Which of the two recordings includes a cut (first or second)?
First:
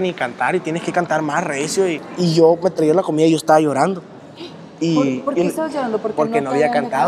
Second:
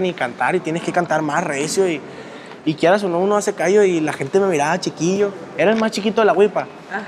first